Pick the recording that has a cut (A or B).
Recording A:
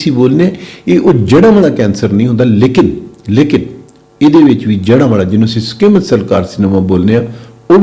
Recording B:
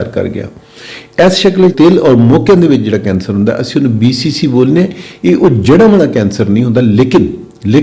B